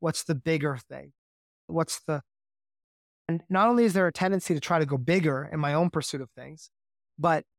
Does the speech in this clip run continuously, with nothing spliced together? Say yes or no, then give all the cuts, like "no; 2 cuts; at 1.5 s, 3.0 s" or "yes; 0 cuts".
yes; 0 cuts